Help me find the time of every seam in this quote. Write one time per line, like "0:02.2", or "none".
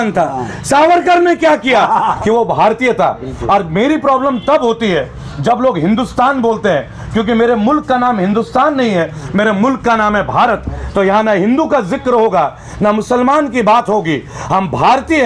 0:02.1